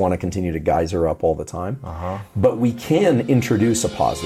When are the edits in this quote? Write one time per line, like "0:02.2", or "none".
none